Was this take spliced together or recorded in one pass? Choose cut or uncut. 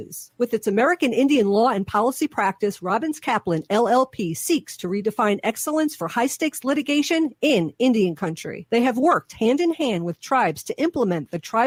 uncut